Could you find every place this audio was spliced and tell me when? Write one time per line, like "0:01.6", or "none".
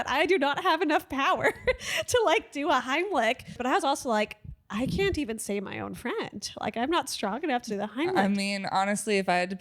0:03.5